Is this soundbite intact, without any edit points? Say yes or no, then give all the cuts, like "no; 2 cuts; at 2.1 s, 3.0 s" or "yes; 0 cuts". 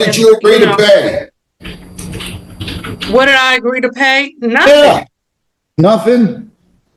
yes; 0 cuts